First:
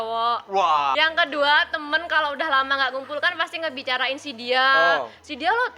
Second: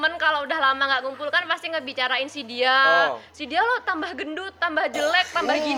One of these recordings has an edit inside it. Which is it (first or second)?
first